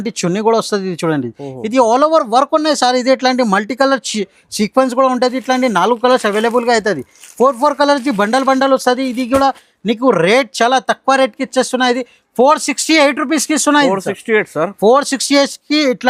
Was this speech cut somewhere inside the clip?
no; 0 cuts

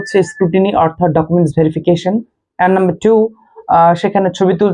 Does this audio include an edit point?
no; 0 cuts

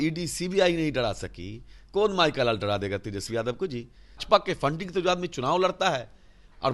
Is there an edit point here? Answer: yes; 1 cut; at 4.2 s

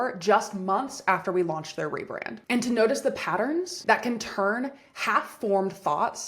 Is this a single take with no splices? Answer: no; 1 cut; at 2.4 s

